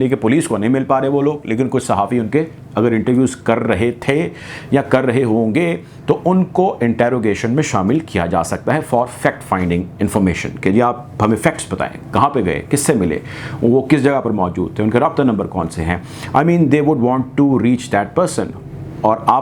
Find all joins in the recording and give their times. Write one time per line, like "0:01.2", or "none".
none